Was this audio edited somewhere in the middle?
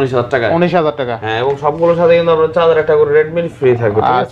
no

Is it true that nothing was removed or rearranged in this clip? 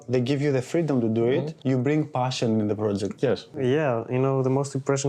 no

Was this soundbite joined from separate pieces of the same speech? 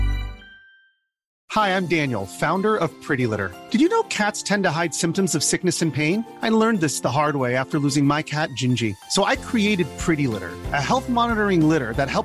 yes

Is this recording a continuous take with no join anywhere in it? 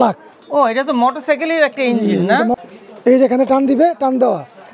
no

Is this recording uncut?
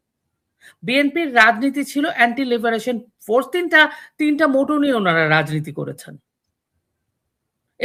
yes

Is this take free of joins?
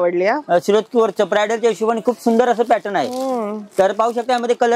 yes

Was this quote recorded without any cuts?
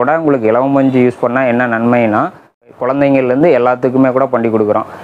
no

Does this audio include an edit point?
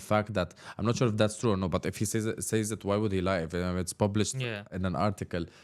yes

